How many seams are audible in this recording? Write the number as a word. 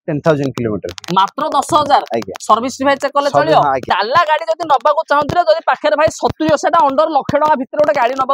one